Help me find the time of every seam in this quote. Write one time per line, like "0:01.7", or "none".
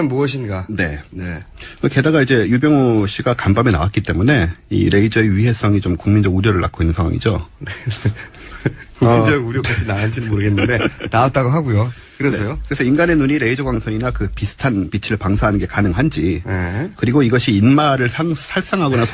0:05.6